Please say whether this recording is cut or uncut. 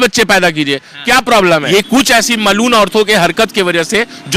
cut